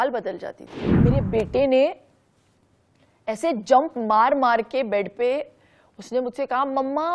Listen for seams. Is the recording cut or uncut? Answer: cut